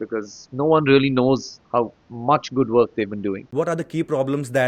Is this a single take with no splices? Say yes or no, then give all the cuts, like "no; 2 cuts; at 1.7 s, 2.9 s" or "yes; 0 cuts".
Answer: no; 1 cut; at 3.4 s